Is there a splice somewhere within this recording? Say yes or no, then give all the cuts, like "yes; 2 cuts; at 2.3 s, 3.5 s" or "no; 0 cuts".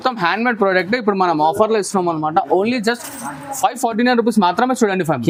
no; 0 cuts